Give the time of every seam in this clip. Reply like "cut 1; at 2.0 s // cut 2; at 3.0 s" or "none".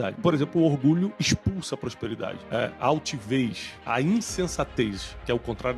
cut 1; at 1.1 s // cut 2; at 2.4 s // cut 3; at 3.7 s